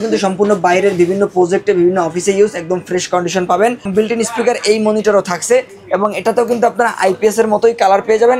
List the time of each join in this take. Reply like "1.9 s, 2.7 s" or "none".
3.9 s